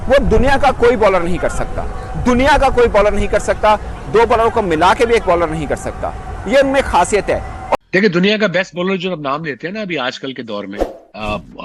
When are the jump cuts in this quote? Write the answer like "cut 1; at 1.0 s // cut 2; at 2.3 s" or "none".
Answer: cut 1; at 7.8 s